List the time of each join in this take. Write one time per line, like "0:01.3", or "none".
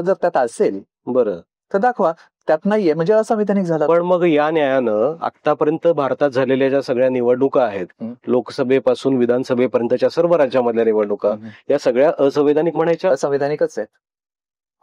none